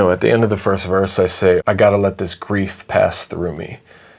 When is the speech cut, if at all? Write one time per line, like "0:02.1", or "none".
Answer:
0:01.6